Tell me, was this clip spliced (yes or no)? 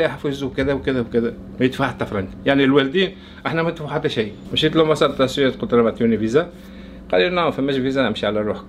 yes